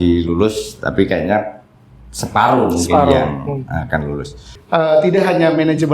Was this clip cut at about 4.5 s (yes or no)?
yes